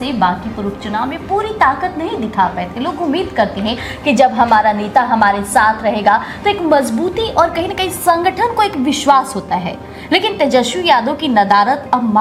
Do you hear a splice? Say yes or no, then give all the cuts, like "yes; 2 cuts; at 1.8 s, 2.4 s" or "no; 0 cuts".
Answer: no; 0 cuts